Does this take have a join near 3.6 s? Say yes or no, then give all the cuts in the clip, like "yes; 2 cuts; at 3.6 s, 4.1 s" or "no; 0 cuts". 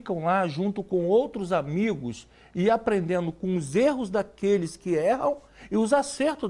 no; 0 cuts